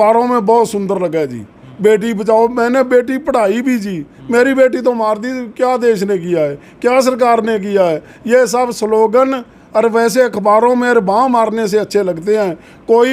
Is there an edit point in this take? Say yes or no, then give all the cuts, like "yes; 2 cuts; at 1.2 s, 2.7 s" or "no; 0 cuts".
no; 0 cuts